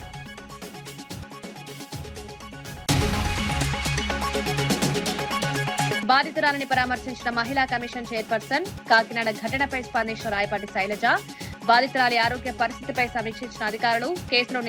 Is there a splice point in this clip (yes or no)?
yes